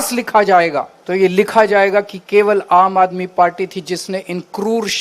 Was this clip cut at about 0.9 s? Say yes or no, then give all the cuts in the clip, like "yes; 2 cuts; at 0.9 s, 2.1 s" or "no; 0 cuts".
yes; 1 cut; at 0.9 s